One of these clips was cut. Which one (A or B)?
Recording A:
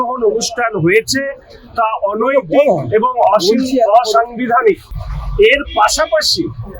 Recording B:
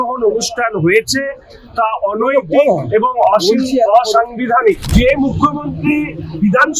B